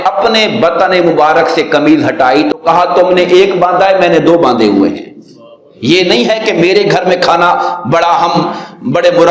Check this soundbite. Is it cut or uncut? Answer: uncut